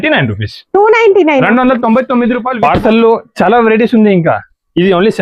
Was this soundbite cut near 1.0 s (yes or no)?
no